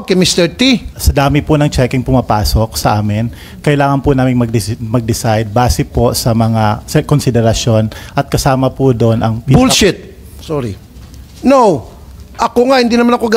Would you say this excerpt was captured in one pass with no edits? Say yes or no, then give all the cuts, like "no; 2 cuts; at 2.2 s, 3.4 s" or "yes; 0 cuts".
no; 1 cut; at 1.0 s